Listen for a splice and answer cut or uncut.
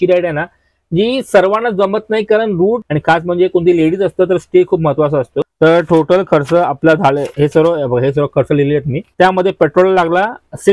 cut